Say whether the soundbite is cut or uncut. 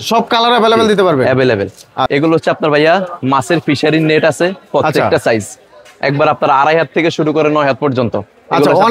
cut